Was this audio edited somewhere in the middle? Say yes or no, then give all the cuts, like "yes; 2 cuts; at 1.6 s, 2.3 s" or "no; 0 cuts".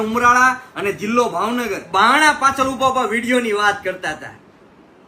yes; 1 cut; at 1.8 s